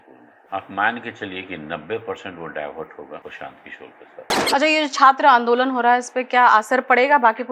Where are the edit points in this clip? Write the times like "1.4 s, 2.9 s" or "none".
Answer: 4.3 s